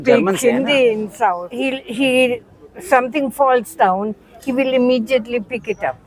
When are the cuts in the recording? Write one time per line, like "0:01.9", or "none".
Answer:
0:01.5